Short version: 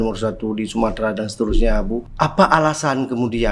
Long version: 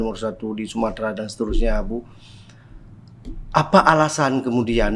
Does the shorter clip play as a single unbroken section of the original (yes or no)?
no